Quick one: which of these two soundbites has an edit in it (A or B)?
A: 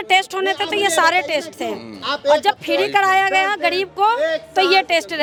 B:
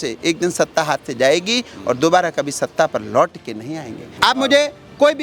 B